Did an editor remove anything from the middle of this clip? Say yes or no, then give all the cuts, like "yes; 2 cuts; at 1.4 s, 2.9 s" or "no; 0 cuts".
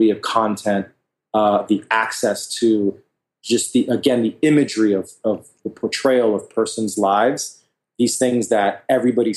no; 0 cuts